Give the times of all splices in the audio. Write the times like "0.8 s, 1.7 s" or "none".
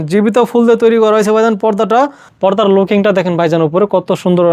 2.2 s